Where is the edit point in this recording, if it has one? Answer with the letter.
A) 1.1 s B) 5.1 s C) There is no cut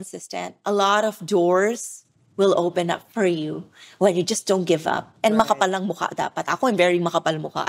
C